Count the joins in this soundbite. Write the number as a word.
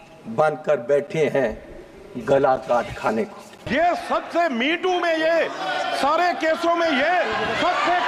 one